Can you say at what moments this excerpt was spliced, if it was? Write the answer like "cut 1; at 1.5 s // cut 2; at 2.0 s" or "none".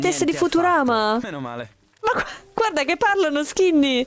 cut 1; at 1.8 s